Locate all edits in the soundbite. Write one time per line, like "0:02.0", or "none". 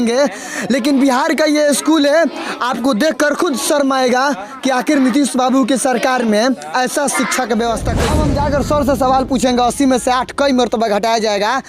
0:08.0